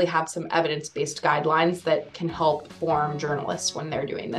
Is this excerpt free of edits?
no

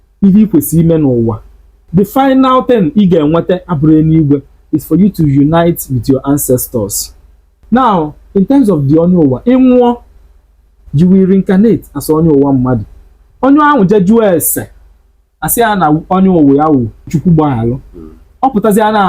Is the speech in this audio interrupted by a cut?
yes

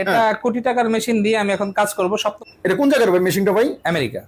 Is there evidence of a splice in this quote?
yes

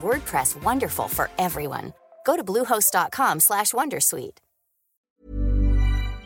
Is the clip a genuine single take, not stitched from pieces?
no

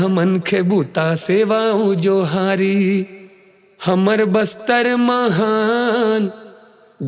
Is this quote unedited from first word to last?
yes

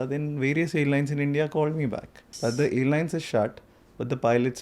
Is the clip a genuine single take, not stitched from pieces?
no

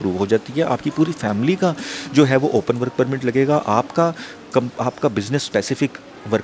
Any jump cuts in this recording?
no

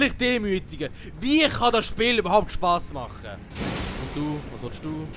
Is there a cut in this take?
yes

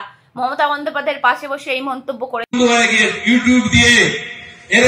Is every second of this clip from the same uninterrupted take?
no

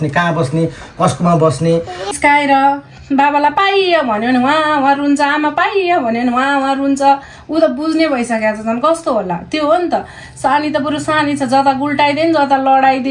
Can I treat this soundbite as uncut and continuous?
no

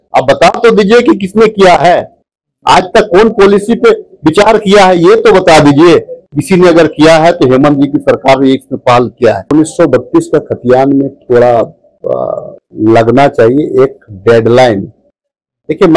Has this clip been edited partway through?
yes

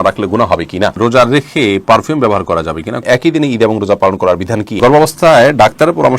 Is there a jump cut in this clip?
yes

